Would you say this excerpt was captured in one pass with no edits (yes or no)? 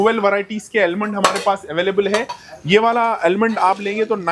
yes